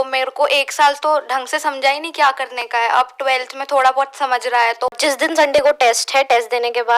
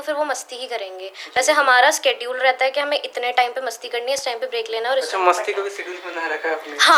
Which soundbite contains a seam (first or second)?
first